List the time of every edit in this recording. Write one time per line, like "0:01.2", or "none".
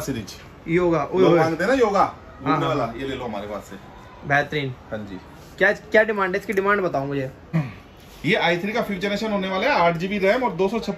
0:07.5